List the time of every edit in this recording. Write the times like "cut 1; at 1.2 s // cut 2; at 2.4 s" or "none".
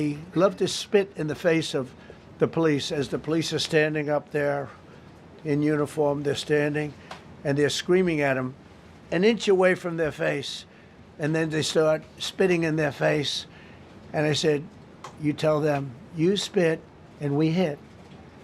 none